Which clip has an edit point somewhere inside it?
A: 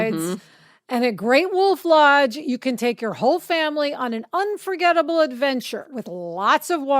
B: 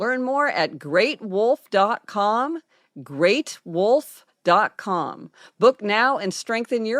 A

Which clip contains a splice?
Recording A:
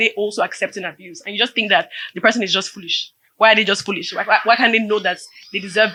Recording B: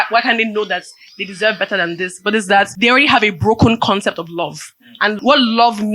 B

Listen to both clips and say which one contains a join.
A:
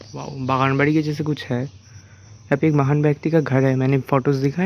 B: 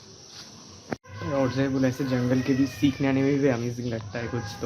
B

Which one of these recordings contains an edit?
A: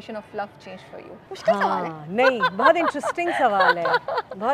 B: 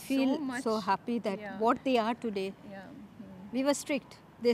A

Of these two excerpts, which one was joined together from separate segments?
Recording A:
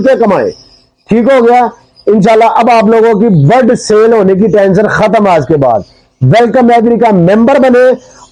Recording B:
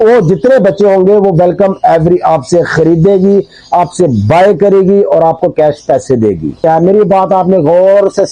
B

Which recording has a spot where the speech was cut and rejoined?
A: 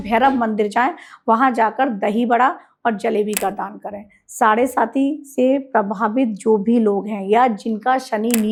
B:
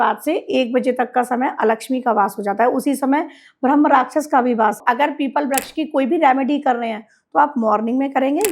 B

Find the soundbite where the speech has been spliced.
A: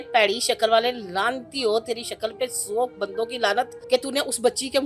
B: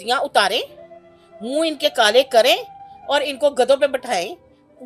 A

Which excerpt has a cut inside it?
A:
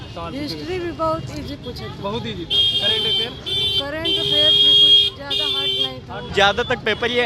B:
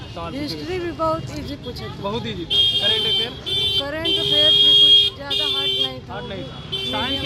A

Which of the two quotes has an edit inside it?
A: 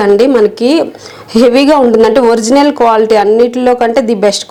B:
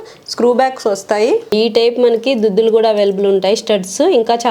B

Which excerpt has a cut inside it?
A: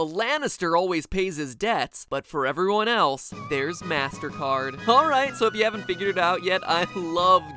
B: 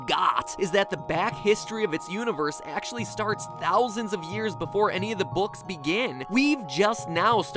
A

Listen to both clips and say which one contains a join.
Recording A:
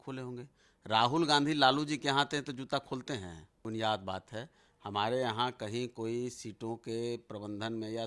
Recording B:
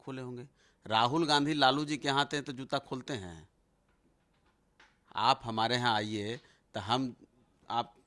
A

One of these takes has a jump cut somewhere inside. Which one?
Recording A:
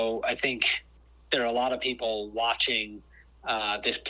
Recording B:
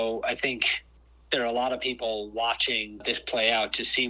B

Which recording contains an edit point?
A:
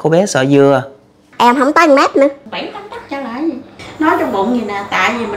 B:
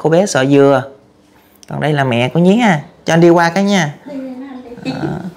A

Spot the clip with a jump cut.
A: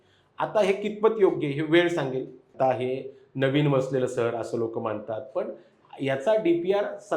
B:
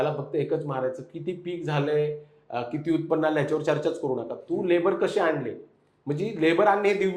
A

